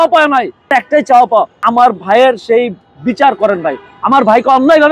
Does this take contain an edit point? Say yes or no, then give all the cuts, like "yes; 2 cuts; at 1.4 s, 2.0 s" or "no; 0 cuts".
yes; 2 cuts; at 0.7 s, 1.6 s